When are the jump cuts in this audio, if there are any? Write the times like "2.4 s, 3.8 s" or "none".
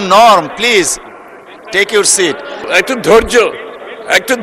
2.7 s